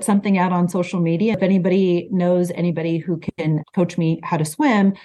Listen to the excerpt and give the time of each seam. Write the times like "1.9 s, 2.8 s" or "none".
1.4 s